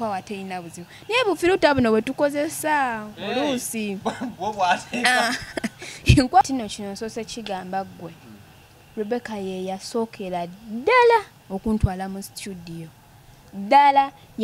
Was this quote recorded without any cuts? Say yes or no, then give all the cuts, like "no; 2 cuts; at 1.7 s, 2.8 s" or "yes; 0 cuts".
no; 1 cut; at 6.4 s